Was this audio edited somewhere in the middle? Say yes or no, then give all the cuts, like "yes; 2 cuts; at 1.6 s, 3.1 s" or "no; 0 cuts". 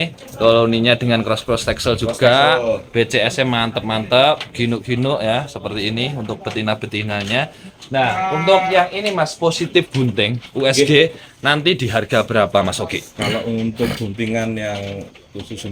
no; 0 cuts